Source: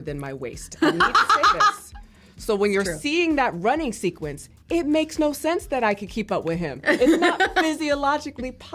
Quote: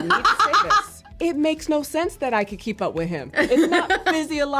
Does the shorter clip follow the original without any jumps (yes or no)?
no